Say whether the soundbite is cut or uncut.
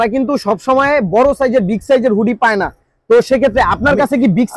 uncut